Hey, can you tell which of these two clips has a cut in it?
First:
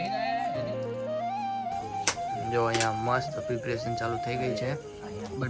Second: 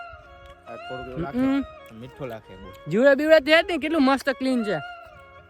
first; 1 cut; at 1.6 s

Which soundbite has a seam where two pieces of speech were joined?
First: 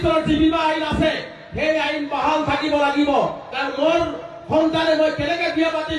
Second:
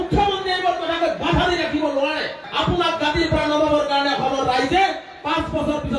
second; 1 cut; at 2.4 s

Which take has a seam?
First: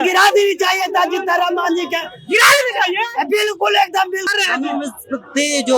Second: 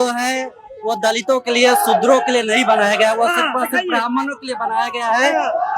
first; 1 cut; at 4.3 s

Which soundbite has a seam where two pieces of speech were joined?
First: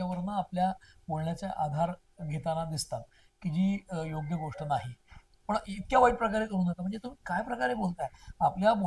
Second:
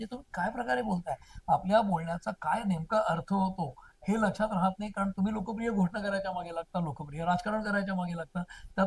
first; 1 cut; at 5.3 s

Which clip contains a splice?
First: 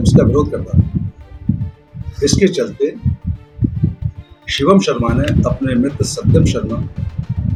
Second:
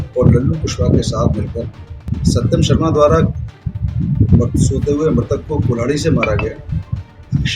second; 1 cut; at 2.1 s

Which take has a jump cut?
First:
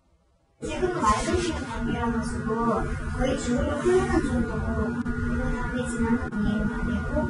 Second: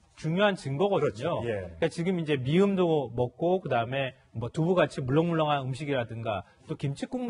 first; 1 cut; at 5.4 s

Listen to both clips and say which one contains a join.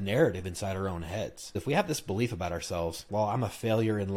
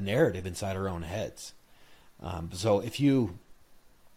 first; 2 cuts; at 1.6 s, 3.0 s

